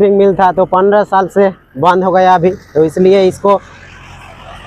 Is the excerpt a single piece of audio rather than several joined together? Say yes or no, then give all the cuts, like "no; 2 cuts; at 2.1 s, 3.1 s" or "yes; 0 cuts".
yes; 0 cuts